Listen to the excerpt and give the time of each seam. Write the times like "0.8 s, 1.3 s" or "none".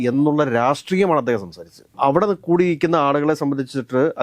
none